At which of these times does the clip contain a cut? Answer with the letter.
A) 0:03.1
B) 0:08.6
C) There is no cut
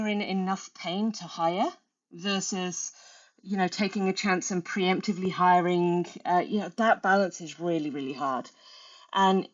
C